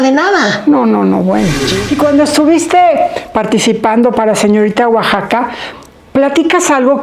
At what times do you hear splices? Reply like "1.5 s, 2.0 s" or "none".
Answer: 1.7 s